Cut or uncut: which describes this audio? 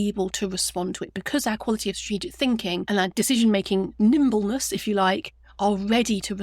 cut